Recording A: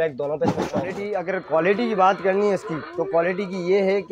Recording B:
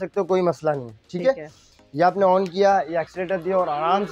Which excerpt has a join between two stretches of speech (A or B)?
A